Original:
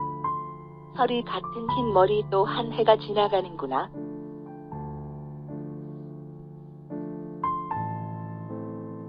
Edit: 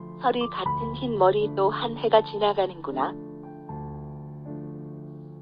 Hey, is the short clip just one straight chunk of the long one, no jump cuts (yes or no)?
no